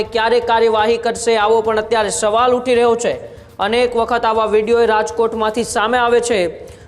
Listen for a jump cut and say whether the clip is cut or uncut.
uncut